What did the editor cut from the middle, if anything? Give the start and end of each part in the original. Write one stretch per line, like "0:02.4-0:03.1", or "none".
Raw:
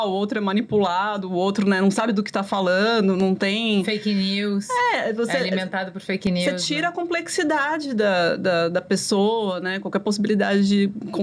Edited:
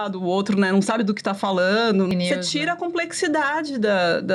0:03.2-0:06.2

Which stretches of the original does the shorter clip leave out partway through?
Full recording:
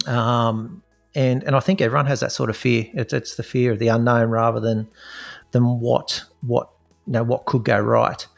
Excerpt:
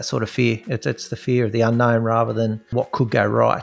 0:05.0-0:07.2

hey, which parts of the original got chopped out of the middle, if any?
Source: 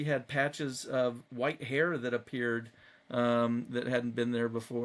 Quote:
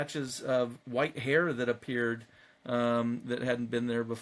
none

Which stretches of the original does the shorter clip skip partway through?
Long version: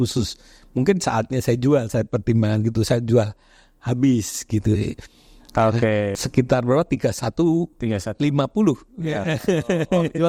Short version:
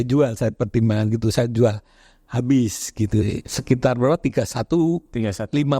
0:05.1-0:06.2

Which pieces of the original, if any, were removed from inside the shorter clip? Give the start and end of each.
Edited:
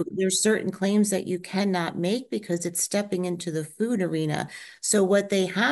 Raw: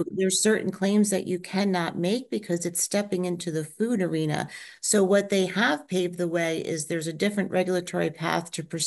none

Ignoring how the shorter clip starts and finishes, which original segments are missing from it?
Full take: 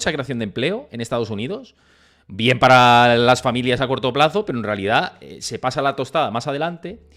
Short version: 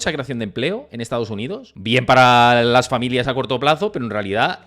0:01.7-0:02.2

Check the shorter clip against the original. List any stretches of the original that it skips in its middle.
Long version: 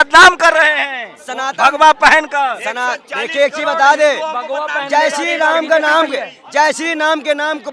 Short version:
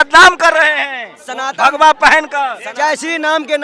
0:02.6-0:06.4

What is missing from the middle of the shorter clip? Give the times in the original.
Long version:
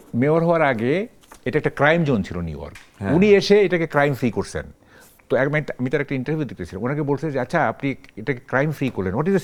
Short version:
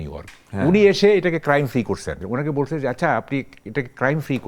0:04.6-0:06.7

